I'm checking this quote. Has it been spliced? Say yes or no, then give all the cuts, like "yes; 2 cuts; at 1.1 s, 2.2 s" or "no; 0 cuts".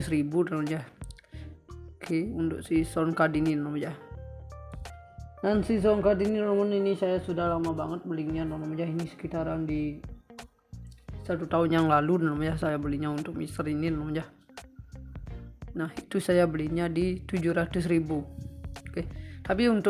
no; 0 cuts